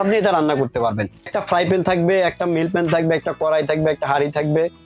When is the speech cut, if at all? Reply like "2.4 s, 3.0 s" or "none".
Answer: 1.4 s